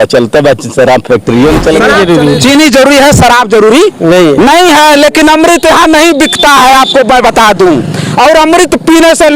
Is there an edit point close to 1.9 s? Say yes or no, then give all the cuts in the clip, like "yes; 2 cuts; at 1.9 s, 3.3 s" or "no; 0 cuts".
yes; 1 cut; at 1.9 s